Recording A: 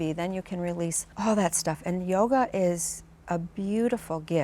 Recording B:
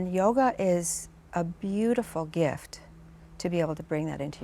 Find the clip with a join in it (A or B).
A